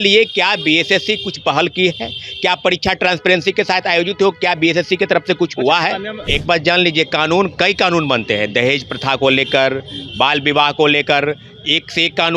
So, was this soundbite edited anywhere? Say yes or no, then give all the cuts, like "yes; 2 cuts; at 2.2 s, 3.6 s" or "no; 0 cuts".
yes; 1 cut; at 6.2 s